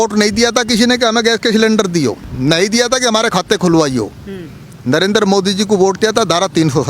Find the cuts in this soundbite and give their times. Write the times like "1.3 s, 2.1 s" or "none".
2.3 s